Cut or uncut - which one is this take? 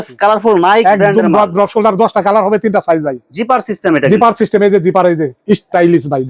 cut